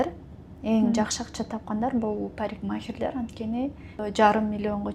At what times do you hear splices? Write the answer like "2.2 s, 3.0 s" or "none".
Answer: 4.0 s